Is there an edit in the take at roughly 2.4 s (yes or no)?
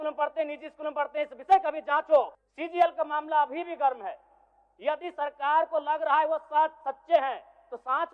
yes